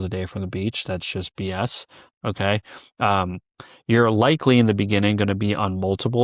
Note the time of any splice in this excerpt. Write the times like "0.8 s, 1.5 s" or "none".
none